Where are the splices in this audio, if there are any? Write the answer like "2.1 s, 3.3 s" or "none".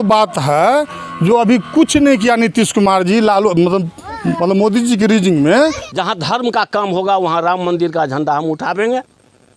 5.9 s

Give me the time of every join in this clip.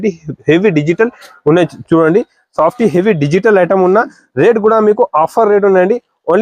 none

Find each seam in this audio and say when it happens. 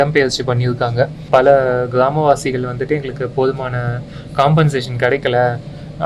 1.2 s

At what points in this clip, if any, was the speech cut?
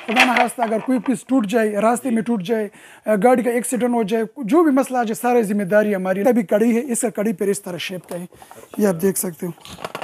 6.2 s

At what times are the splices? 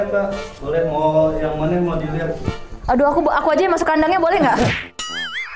none

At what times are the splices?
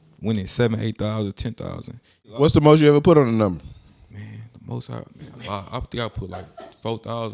2.2 s

